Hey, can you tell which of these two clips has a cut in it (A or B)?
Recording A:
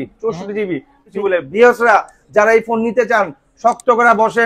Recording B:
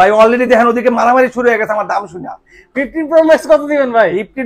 A